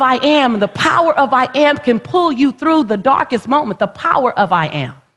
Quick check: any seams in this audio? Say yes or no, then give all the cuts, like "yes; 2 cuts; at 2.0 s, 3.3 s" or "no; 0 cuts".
no; 0 cuts